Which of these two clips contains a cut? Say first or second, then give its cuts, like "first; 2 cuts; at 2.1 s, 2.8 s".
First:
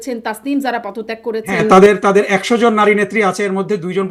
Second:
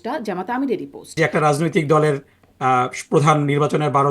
second; 1 cut; at 1.2 s